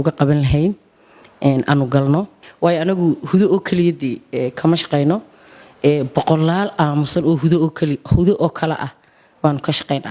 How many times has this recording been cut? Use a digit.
1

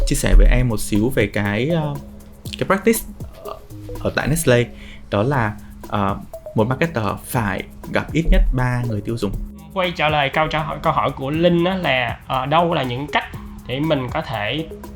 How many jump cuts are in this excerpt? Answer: 1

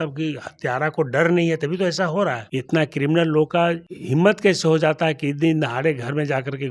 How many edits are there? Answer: 2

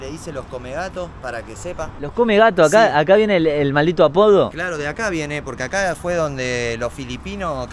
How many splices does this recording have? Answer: 0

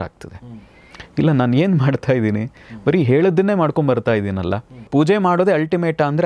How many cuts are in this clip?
1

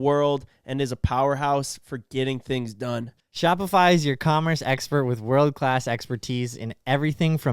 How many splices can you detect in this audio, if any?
1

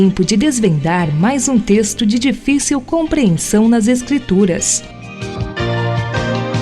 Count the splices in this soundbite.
1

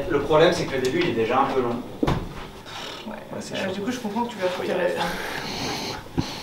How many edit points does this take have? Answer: 1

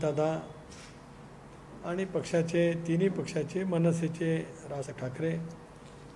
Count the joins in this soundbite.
1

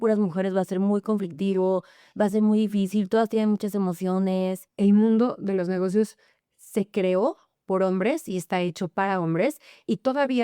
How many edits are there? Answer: 1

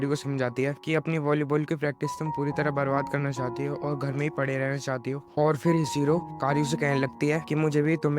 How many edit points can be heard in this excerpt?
0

